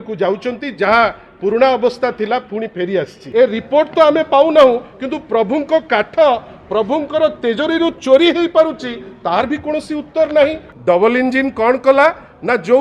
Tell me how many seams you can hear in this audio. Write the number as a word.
two